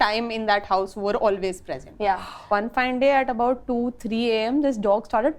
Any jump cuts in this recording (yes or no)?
yes